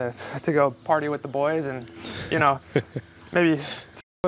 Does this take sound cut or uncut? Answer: uncut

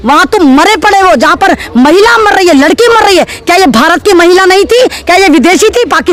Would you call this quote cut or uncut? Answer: uncut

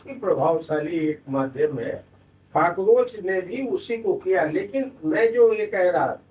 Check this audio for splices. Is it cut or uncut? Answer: uncut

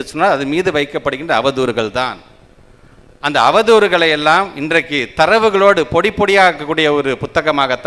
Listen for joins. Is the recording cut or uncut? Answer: uncut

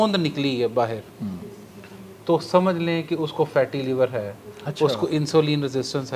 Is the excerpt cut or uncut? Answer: uncut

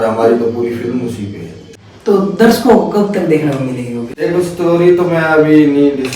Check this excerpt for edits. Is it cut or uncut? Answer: cut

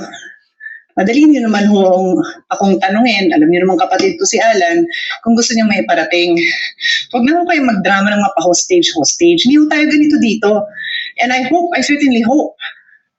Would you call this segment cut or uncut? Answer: uncut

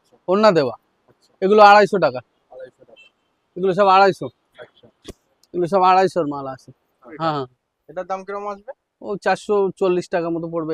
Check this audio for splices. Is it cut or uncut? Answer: cut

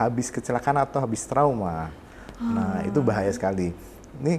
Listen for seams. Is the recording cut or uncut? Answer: uncut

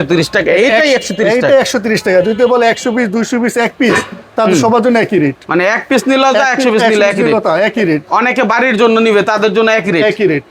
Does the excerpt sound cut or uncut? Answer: uncut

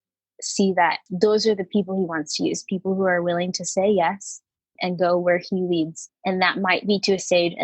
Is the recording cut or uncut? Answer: cut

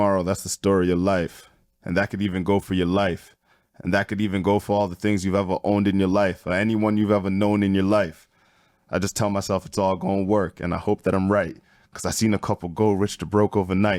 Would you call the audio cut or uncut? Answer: uncut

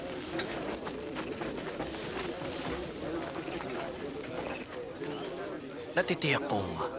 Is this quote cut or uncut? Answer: cut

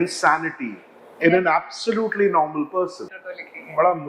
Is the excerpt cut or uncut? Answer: cut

